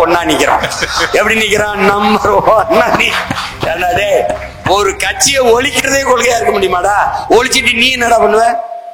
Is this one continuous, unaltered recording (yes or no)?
yes